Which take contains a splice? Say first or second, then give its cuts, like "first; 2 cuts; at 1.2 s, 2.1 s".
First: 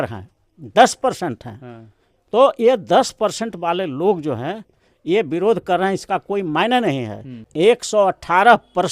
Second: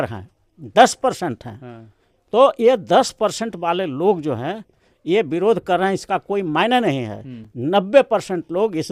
first; 1 cut; at 7.4 s